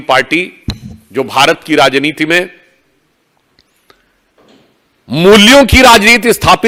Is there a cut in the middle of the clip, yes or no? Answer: no